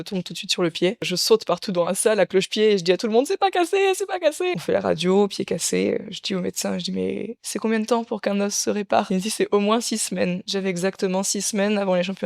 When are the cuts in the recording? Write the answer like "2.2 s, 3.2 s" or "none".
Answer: 1.1 s, 4.5 s, 9.1 s, 10.8 s